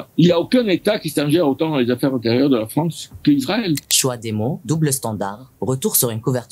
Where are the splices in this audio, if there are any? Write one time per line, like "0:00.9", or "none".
0:03.8